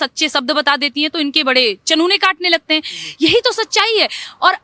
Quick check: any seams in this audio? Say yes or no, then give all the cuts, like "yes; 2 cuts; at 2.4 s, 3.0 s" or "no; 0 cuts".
no; 0 cuts